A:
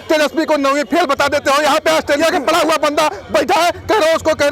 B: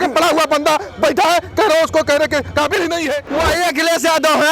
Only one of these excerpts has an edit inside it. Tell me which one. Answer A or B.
B